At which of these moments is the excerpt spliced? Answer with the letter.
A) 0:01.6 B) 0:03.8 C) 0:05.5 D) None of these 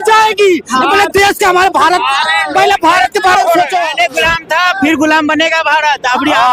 B